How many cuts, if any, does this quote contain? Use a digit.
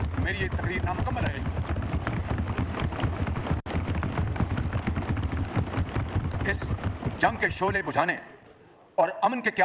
0